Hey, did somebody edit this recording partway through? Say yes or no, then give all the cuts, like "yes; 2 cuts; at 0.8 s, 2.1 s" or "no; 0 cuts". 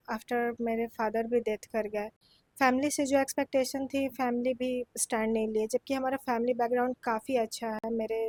no; 0 cuts